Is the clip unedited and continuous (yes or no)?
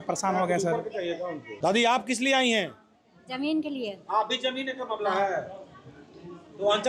no